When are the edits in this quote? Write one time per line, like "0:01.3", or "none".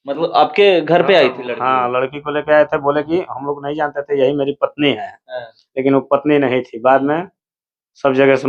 none